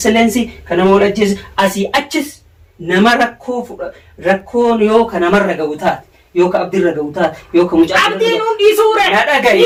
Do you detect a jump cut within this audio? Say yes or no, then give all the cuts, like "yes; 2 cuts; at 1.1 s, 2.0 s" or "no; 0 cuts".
no; 0 cuts